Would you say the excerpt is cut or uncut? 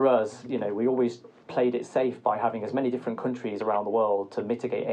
uncut